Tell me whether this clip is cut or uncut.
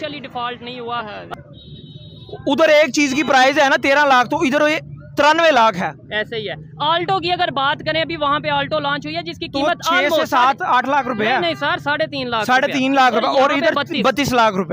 cut